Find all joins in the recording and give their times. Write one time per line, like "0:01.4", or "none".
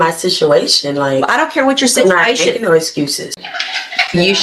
0:03.4